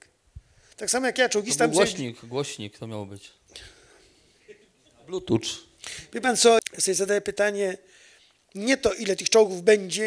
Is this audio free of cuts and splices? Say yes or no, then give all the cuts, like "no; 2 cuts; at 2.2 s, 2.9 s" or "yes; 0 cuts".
no; 1 cut; at 6.6 s